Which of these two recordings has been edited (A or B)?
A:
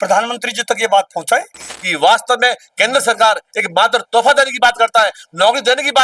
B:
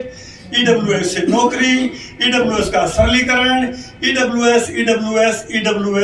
A